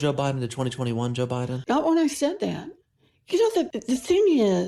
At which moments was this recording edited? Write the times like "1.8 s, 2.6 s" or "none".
3.8 s